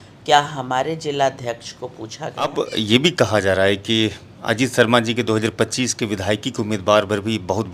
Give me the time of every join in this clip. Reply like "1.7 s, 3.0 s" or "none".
2.5 s